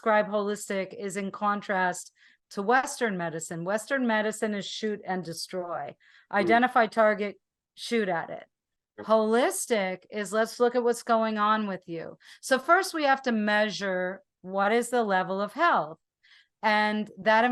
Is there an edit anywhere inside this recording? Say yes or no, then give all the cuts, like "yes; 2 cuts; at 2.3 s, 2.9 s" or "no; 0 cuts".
no; 0 cuts